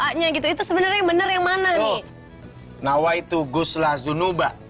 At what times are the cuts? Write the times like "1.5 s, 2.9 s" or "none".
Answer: 2.1 s